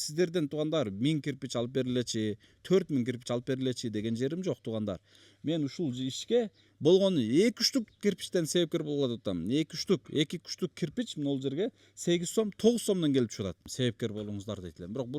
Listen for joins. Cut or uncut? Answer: cut